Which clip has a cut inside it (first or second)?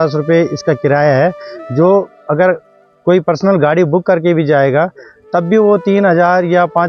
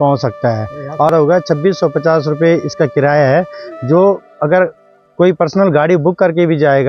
second